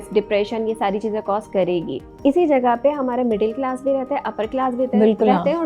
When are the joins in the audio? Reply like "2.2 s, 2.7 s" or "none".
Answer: 2.2 s